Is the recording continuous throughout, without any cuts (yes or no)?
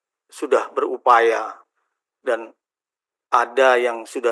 yes